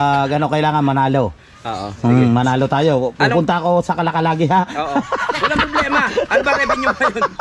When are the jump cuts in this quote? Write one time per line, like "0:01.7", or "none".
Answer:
none